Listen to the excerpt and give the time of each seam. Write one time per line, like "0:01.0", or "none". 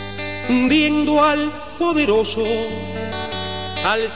0:03.2